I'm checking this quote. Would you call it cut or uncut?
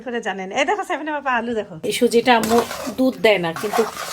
cut